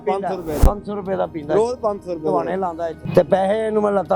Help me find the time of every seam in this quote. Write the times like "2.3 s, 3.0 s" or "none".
3.0 s